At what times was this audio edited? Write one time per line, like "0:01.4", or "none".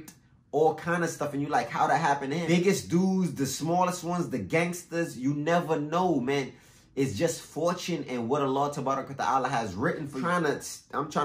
0:02.4
0:10.2